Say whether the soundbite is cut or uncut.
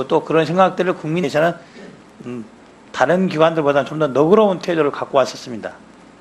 uncut